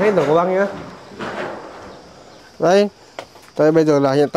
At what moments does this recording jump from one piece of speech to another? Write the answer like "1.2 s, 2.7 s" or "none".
2.4 s